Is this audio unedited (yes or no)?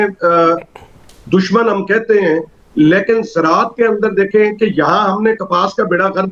yes